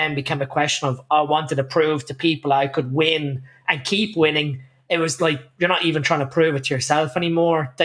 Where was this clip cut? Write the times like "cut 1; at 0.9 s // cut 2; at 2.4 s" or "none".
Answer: none